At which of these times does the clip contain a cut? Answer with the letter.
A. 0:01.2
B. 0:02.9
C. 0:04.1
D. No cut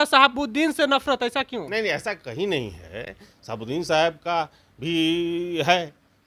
D